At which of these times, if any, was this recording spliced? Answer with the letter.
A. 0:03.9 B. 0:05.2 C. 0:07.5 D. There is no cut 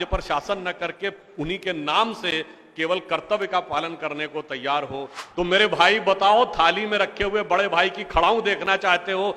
B